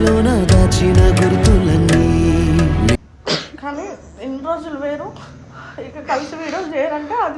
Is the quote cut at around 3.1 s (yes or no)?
yes